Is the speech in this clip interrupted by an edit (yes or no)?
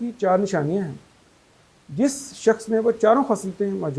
no